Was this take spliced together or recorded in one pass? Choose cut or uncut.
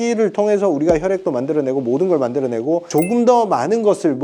cut